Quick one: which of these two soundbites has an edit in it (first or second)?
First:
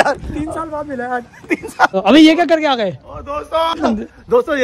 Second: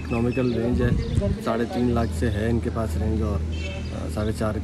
first